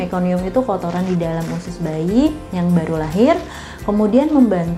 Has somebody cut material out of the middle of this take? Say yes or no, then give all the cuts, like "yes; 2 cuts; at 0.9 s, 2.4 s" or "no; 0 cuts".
no; 0 cuts